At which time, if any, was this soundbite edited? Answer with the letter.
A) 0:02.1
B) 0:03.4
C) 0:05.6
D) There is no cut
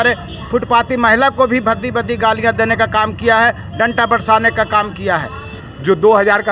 C